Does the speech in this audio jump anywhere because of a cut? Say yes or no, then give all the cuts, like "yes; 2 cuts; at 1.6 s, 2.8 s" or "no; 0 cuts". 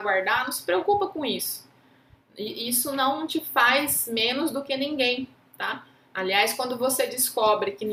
no; 0 cuts